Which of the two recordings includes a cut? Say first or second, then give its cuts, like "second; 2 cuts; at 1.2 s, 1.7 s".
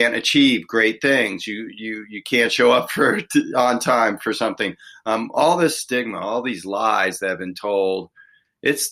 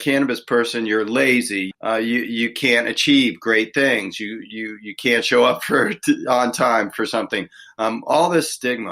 second; 1 cut; at 1.7 s